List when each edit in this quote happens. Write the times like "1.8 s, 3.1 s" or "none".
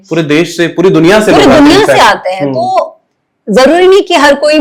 none